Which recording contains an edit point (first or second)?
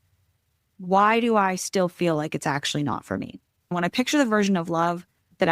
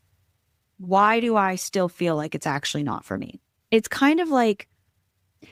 first